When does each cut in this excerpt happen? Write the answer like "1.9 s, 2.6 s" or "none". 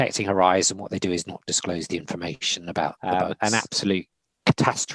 3.0 s